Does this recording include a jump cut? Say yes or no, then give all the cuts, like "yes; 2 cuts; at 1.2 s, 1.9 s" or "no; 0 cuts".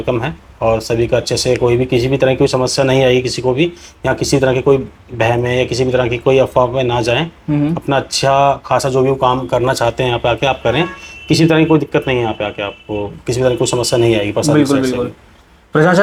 no; 0 cuts